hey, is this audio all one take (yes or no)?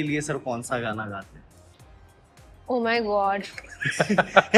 yes